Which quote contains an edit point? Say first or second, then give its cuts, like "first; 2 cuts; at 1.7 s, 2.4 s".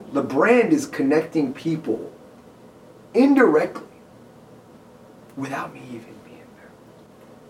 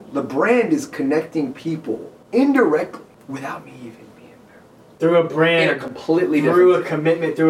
second; 3 cuts; at 2.1 s, 3.1 s, 5.0 s